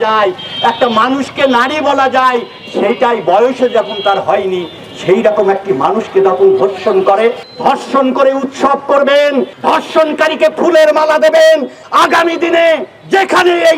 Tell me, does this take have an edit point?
yes; 3 cuts; at 7.5 s, 9.5 s, 11.8 s

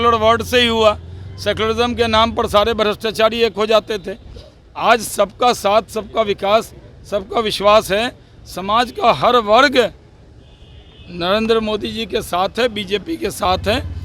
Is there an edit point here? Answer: no; 0 cuts

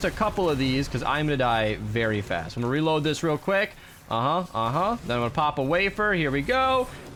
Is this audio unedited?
yes; 0 cuts

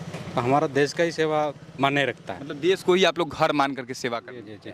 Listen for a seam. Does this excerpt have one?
no; 0 cuts

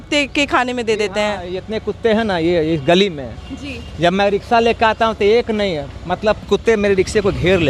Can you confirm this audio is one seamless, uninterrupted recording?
no; 1 cut; at 6.4 s

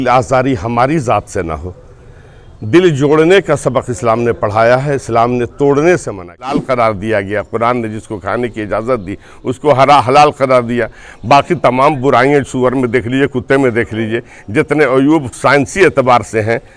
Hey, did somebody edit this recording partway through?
yes; 1 cut; at 6.6 s

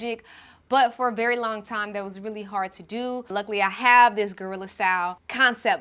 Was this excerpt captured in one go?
no; 1 cut; at 3.3 s

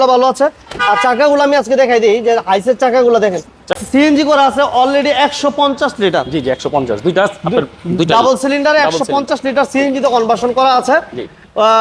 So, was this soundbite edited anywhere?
yes; 1 cut; at 3.8 s

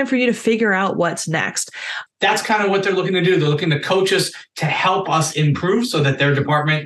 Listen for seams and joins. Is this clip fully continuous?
no; 1 cut; at 2.0 s

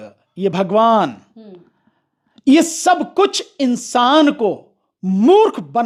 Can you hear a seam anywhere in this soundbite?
no; 0 cuts

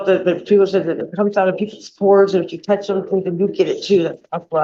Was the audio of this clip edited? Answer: no; 0 cuts

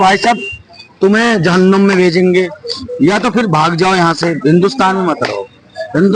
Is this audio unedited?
yes; 0 cuts

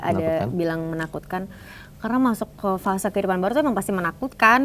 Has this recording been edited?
no; 0 cuts

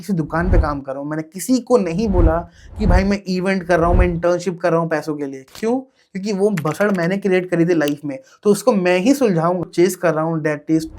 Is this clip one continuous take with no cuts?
no; 1 cut; at 9.7 s

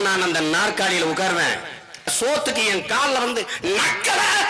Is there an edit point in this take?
yes; 1 cut; at 2.1 s

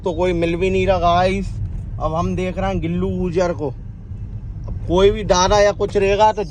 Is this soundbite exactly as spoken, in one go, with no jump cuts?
yes; 0 cuts

